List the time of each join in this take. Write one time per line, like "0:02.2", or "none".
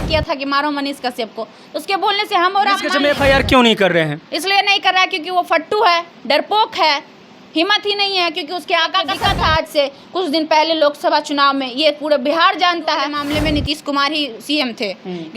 0:02.9
0:09.1
0:13.1